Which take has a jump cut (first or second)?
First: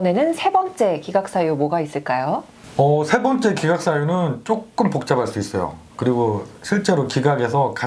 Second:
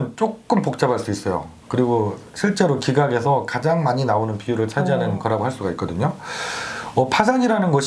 first